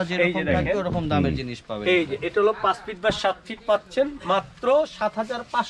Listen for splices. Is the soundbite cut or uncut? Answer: uncut